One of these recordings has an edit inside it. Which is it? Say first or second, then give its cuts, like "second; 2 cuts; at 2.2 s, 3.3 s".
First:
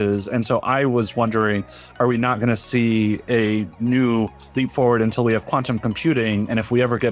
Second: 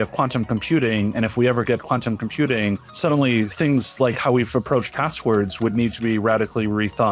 second; 1 cut; at 2.9 s